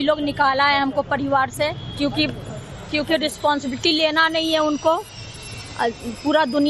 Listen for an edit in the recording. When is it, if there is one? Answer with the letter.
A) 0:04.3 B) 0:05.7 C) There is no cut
A